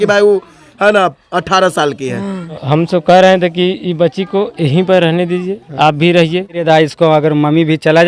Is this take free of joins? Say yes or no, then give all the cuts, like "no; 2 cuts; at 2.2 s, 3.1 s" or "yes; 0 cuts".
no; 2 cuts; at 2.6 s, 6.6 s